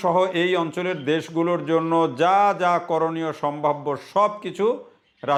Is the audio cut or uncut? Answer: uncut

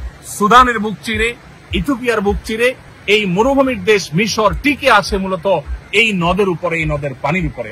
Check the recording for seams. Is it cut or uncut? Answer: cut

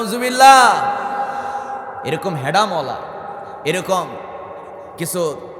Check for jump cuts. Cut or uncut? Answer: uncut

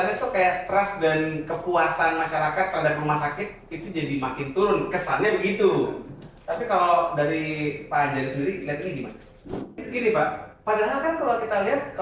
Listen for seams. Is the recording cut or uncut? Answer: cut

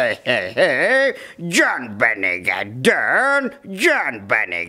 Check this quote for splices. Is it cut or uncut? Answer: uncut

